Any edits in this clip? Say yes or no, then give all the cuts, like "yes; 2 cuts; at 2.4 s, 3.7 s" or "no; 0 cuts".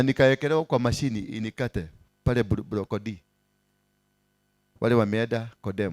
no; 0 cuts